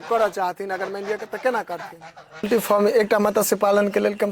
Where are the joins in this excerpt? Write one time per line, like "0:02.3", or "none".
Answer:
0:02.5